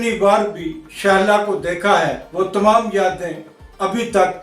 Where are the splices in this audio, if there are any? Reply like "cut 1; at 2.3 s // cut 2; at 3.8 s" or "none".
cut 1; at 2.2 s